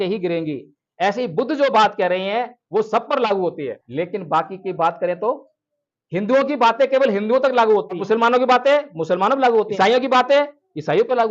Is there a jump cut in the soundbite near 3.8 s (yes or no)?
yes